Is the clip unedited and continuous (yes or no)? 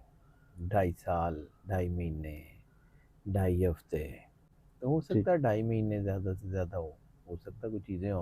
yes